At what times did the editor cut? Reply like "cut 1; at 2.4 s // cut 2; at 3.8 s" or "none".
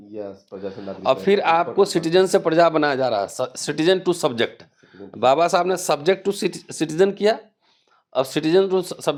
none